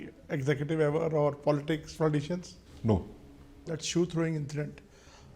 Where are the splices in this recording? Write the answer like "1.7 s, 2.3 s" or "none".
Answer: 3.8 s